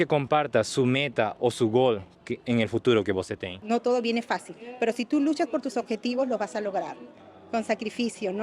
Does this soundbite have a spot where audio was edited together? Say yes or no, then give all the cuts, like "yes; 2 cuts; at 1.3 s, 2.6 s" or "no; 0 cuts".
yes; 1 cut; at 3.6 s